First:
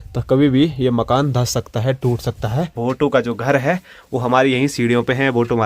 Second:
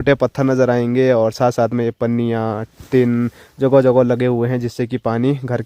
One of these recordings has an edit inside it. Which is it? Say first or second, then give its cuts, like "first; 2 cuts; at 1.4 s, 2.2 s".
first; 1 cut; at 2.8 s